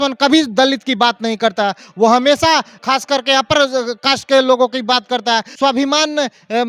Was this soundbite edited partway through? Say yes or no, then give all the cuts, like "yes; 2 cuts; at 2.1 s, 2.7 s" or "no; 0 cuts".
yes; 2 cuts; at 2.8 s, 5.5 s